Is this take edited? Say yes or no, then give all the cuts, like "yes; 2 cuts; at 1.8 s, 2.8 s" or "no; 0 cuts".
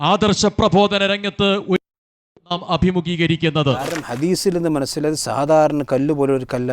yes; 1 cut; at 4.1 s